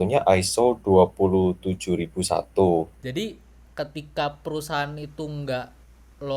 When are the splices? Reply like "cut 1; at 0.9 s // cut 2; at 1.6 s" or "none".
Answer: cut 1; at 2.9 s